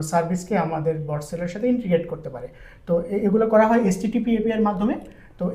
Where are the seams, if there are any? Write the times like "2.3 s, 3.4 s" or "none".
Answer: none